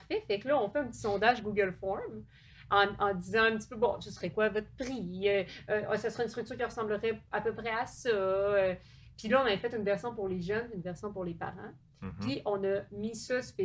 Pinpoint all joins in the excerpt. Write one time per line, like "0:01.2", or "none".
none